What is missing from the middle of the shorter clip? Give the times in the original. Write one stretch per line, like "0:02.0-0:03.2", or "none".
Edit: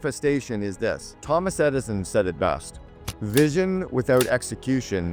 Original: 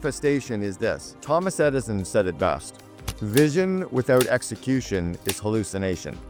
none

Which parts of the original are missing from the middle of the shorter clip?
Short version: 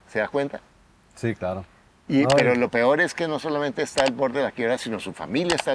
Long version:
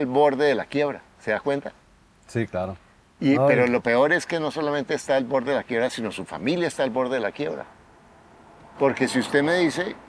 none

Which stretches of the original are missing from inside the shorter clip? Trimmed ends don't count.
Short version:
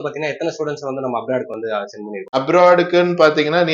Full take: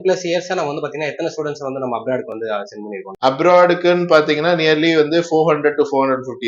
0:03.1-0:03.3

